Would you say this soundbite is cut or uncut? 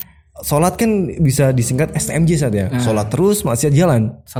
uncut